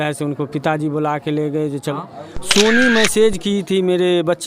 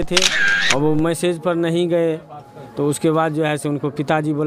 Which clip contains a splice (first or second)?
first